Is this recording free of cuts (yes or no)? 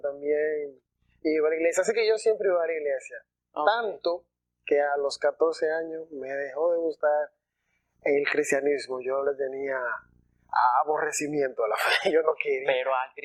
yes